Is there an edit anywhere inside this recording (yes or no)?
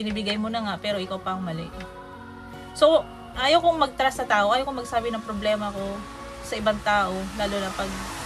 no